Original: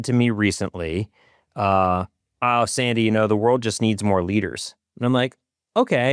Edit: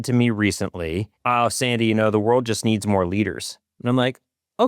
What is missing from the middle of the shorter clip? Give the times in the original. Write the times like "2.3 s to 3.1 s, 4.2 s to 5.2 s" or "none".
1.1 s to 2.2 s